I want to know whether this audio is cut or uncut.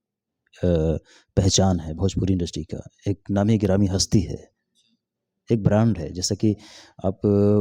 uncut